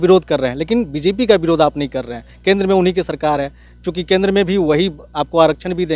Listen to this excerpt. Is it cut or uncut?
uncut